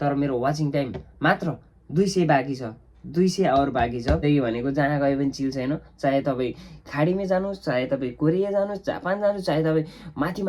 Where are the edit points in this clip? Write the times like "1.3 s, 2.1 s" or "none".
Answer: 4.2 s